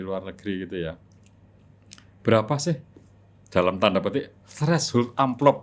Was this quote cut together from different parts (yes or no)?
no